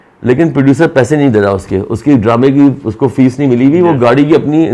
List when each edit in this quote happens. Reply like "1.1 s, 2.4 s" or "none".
none